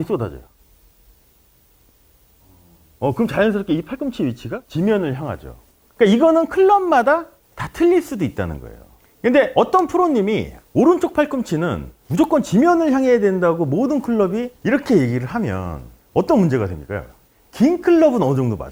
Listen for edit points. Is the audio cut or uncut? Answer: uncut